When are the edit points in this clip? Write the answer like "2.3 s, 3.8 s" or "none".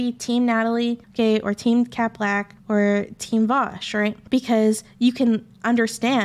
1.0 s, 2.5 s, 4.2 s